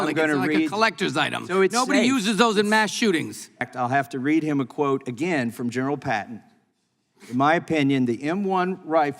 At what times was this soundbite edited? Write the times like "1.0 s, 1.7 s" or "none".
3.6 s